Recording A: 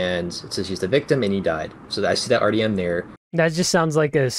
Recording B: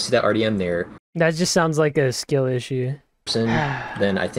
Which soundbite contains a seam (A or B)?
B